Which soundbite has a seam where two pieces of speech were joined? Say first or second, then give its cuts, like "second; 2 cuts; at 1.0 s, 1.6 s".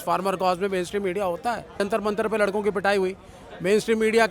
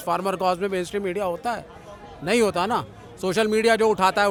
first; 1 cut; at 1.8 s